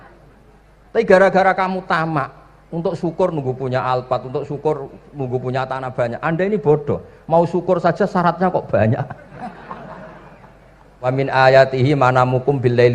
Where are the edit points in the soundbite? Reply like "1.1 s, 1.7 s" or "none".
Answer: 11.1 s